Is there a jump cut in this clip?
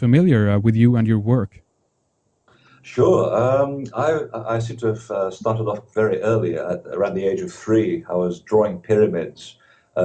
no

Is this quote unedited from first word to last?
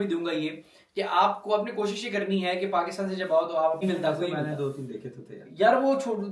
no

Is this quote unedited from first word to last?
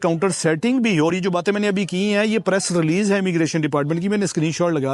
yes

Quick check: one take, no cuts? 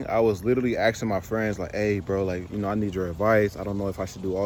yes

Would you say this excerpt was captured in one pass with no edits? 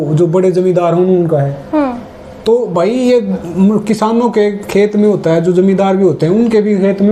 yes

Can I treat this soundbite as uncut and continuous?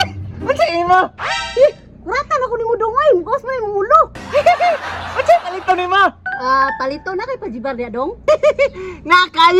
yes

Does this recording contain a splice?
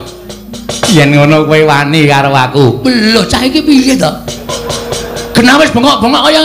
no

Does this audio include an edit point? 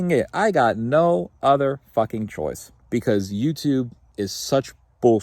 yes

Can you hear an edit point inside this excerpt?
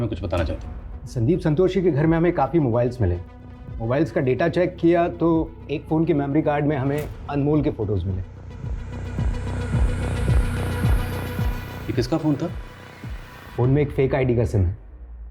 no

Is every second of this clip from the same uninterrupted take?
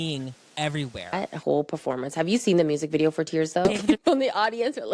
no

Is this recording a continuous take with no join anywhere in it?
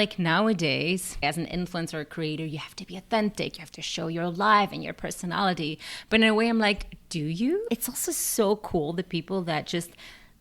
no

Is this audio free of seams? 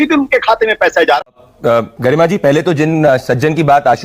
no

